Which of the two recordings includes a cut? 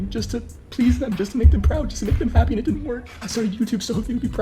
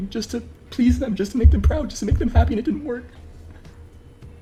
first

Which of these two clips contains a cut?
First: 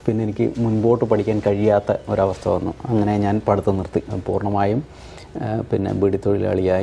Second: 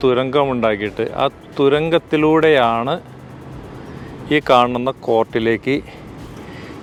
first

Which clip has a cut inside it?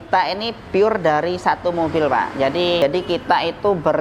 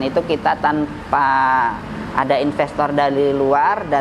first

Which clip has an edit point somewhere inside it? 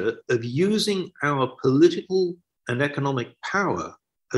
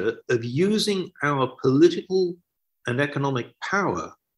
first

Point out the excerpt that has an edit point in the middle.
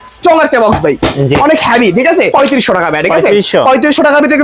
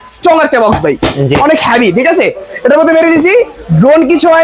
first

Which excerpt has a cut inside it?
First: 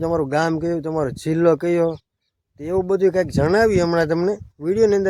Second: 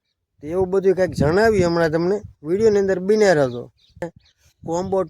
second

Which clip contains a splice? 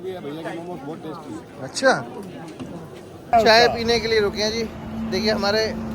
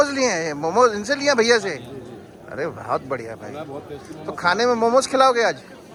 first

